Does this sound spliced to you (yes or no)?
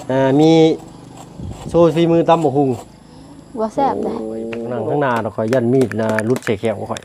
yes